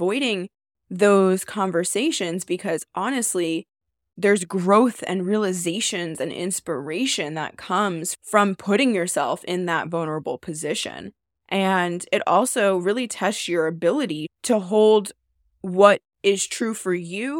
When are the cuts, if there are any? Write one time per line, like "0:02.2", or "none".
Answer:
0:04.1
0:08.1
0:14.3